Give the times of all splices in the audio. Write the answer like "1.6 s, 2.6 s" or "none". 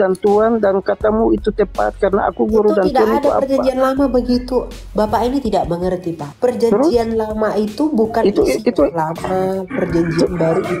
none